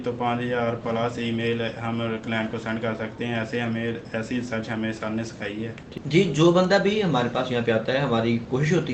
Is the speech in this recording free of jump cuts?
no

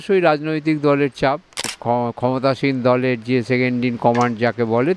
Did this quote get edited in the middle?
yes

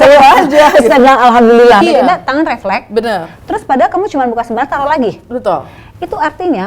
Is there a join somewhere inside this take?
yes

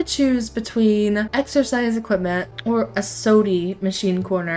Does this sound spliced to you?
yes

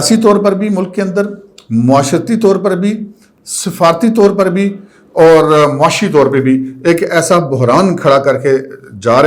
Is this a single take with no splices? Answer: yes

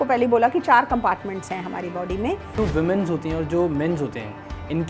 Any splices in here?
yes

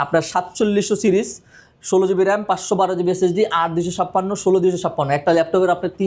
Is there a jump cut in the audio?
no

